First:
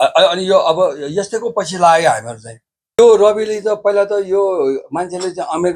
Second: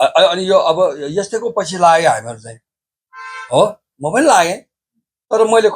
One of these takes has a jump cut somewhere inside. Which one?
first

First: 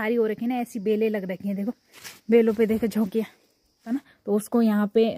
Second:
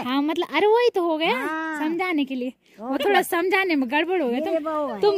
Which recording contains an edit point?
first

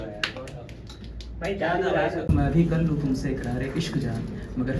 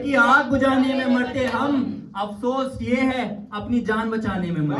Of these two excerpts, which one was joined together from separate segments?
first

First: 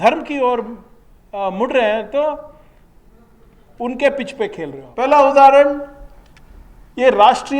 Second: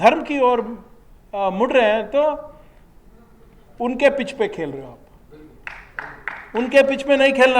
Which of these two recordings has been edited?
first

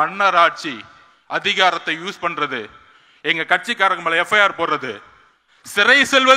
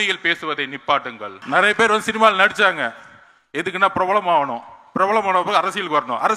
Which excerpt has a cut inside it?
second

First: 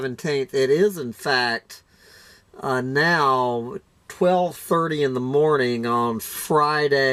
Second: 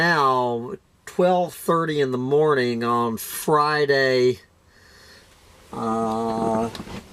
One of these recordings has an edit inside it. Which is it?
second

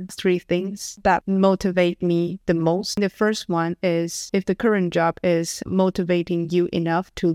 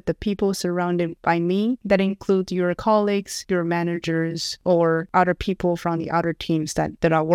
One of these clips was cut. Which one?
first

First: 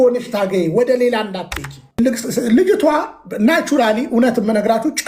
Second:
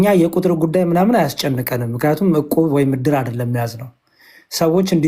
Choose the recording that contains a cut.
first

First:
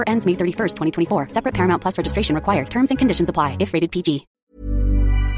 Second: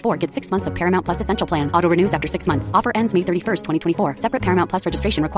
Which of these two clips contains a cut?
first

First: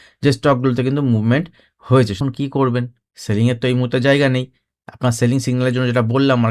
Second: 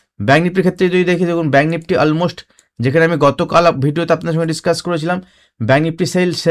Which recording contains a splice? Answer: first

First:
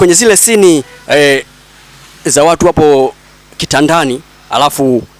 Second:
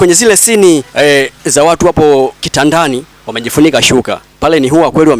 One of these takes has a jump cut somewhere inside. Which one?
second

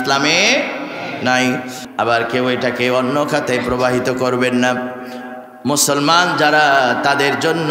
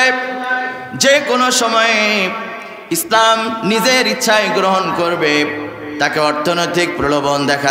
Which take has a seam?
first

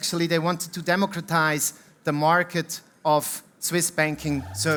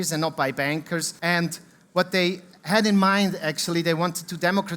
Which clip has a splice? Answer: second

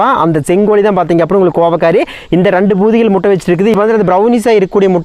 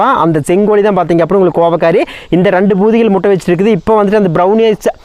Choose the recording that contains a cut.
first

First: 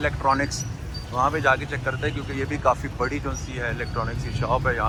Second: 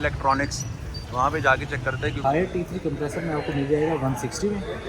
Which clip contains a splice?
second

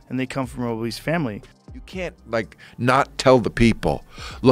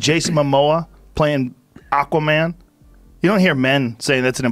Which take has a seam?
first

